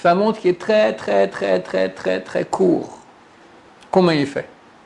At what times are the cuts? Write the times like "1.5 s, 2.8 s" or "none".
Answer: none